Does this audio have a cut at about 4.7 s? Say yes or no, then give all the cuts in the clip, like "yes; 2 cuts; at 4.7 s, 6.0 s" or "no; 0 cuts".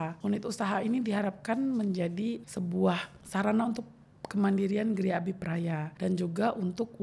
no; 1 cut; at 2.4 s